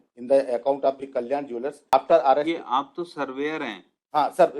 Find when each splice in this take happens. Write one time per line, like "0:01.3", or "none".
0:01.9